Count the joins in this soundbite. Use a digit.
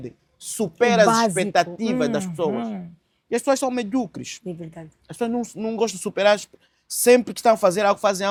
0